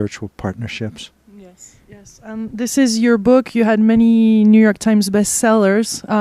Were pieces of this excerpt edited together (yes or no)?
no